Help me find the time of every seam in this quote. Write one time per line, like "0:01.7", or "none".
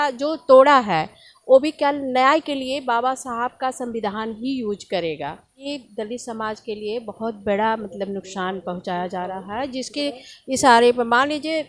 0:05.6